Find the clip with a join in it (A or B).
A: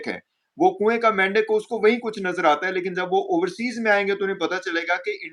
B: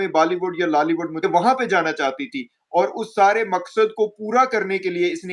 B